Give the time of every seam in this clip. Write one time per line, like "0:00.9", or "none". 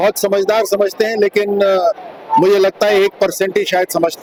none